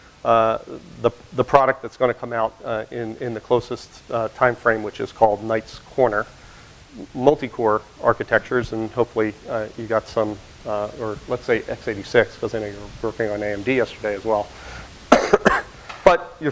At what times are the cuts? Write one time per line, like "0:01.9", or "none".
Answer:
none